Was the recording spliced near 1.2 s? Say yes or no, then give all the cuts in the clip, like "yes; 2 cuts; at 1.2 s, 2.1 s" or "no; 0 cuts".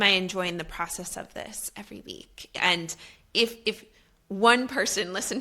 no; 1 cut; at 2.5 s